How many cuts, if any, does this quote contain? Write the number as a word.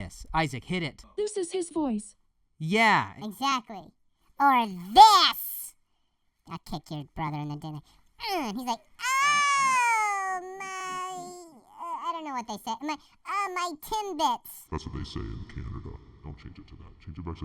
one